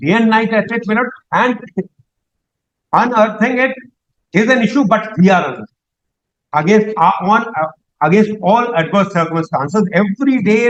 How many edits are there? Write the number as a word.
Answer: zero